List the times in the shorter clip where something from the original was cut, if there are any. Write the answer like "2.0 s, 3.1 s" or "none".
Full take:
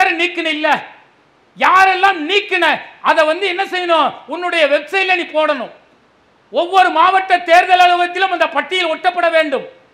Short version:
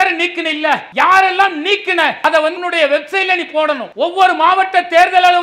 0.9 s, 2.4 s, 3.9 s